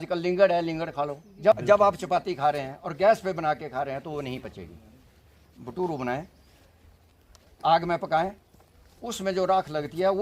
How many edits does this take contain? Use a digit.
1